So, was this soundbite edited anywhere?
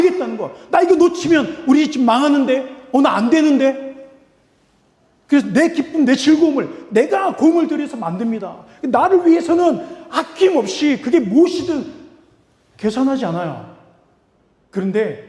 no; 0 cuts

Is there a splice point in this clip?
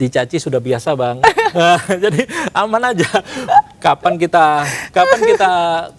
no; 0 cuts

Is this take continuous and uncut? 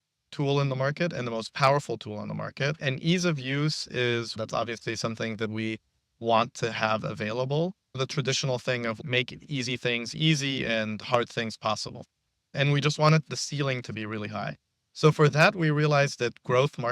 no; 3 cuts; at 4.3 s, 8.0 s, 9.0 s

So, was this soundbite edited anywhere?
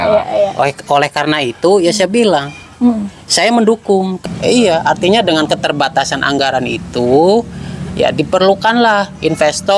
yes; 1 cut; at 4.1 s

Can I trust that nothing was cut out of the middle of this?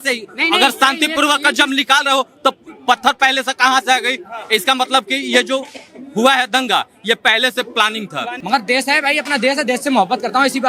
no; 1 cut; at 8.3 s

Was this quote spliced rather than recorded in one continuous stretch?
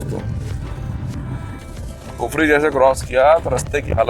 yes; 1 cut; at 1.7 s

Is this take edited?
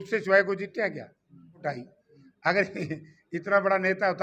yes; 1 cut; at 1.6 s

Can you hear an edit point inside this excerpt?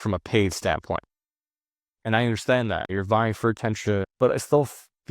yes; 2 cuts; at 2.9 s, 4.0 s

